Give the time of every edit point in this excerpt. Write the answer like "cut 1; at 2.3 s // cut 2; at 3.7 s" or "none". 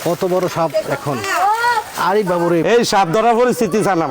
cut 1; at 2.6 s

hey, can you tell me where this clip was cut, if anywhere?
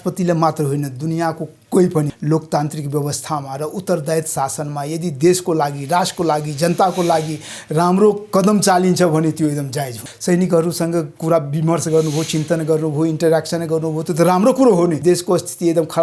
cut 1; at 2.1 s // cut 2; at 10.1 s // cut 3; at 15.0 s

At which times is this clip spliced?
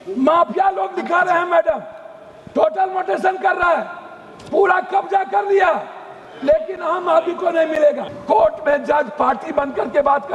cut 1; at 8.1 s

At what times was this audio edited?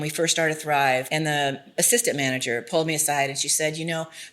cut 1; at 1.1 s

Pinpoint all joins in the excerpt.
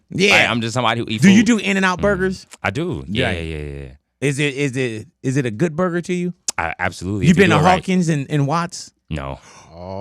cut 1; at 1.1 s

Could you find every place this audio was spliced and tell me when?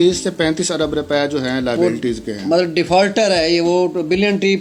none

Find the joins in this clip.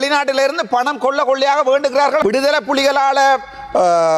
cut 1; at 2.2 s

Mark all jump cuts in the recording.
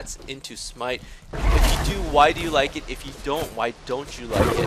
none

